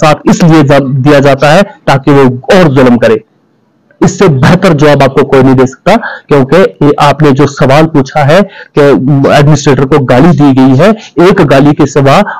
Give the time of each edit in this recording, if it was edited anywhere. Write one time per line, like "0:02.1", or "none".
none